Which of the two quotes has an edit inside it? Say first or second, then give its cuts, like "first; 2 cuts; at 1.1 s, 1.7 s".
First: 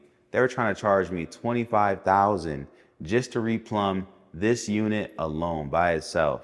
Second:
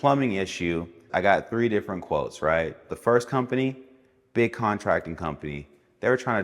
second; 2 cuts; at 1.0 s, 2.9 s